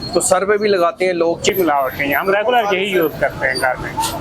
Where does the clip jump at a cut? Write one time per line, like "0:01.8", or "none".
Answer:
0:01.5